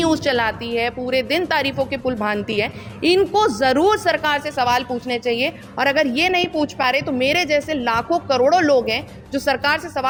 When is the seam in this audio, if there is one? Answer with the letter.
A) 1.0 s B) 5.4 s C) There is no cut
C